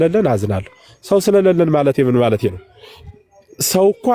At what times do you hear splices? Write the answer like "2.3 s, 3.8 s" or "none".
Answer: none